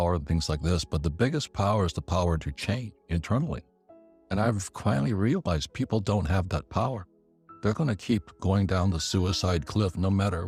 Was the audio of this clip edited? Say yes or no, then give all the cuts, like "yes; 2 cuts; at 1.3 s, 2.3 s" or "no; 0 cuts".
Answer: no; 0 cuts